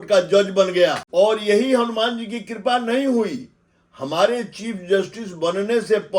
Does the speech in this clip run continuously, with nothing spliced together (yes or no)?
no